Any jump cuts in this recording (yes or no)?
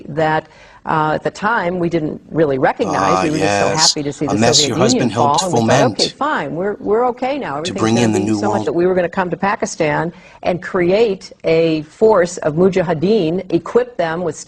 no